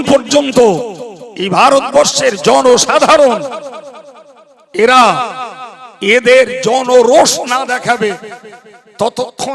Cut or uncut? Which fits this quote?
uncut